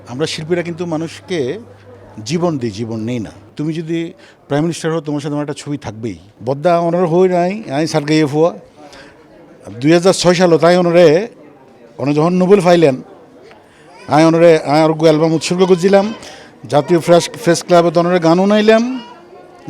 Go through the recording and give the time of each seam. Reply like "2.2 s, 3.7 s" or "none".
3.5 s, 6.3 s